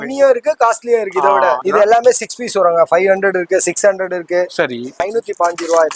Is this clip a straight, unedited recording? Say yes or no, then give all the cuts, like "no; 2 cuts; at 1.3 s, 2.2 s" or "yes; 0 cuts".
no; 2 cuts; at 1.6 s, 5.0 s